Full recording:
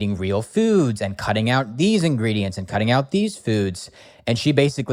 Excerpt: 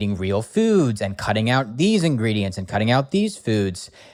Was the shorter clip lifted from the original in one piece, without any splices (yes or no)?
yes